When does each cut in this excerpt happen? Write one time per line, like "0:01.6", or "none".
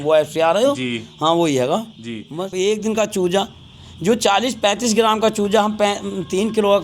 0:02.5